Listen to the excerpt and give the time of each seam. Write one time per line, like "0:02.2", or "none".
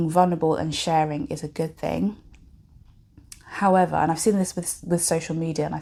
none